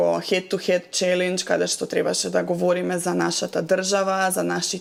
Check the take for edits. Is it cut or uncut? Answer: uncut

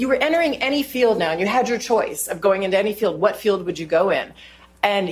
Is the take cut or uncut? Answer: uncut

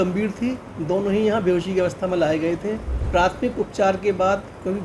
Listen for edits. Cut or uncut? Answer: cut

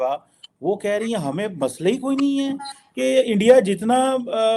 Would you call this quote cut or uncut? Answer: uncut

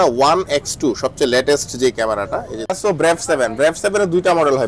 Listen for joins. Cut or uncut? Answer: cut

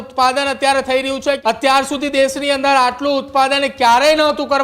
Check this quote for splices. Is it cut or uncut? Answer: cut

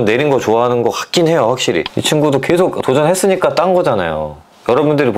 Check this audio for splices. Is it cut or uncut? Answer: cut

